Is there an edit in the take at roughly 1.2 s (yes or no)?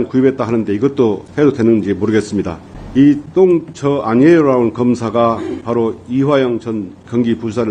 yes